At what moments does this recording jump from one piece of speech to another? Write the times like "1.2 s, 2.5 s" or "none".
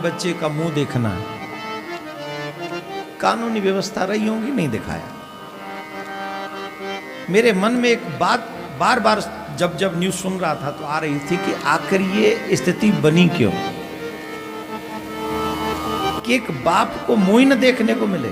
none